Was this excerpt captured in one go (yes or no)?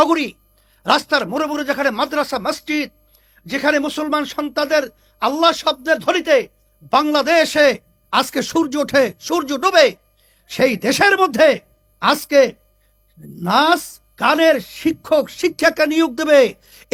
yes